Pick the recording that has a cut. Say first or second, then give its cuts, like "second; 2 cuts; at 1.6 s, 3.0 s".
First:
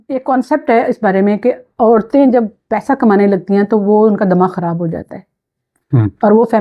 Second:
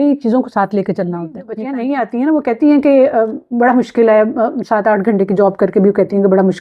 second; 1 cut; at 1.6 s